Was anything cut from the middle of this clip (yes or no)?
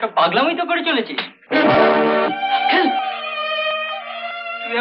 no